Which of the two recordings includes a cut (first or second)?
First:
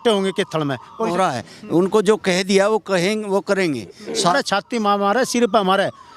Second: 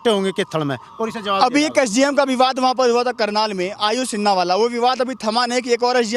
first